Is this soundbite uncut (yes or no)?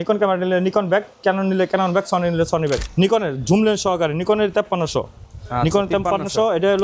no